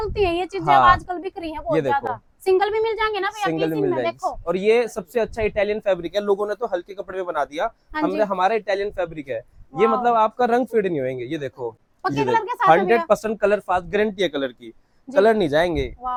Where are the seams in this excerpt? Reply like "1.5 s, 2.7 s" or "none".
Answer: none